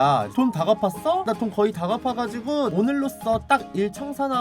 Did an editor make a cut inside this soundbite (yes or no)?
yes